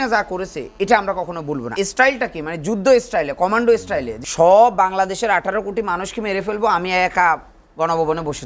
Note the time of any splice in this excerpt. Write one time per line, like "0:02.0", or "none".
0:01.7
0:04.2